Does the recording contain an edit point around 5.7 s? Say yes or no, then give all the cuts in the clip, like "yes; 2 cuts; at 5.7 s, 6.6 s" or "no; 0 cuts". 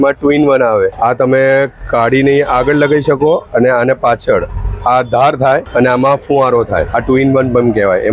yes; 3 cuts; at 0.9 s, 5.7 s, 6.9 s